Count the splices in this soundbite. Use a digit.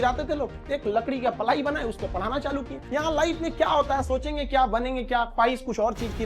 1